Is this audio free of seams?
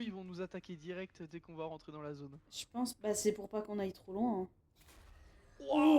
yes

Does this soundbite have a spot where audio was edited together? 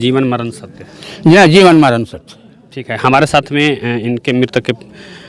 no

